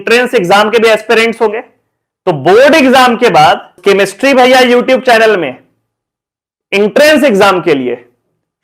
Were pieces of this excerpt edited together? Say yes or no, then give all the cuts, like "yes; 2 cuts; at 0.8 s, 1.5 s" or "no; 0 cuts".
no; 0 cuts